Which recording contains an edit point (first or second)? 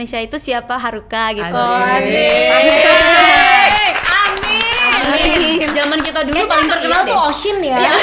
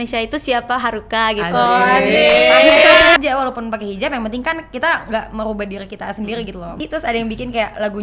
second